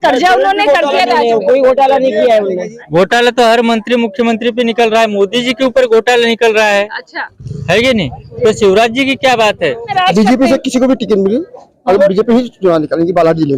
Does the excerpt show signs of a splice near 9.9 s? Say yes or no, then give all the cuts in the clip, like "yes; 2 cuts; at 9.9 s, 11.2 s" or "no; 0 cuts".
yes; 2 cuts; at 2.7 s, 9.9 s